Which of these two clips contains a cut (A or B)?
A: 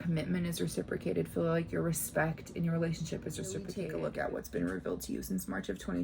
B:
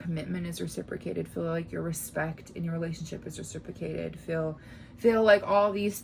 A